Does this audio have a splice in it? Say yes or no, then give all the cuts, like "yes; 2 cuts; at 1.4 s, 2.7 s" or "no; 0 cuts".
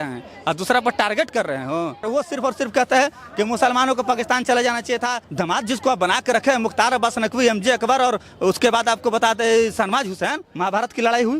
yes; 3 cuts; at 2.0 s, 5.2 s, 10.4 s